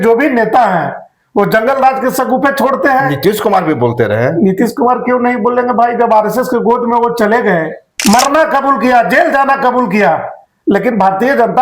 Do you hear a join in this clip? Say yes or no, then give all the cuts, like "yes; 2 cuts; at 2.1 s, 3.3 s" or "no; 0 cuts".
yes; 1 cut; at 7.8 s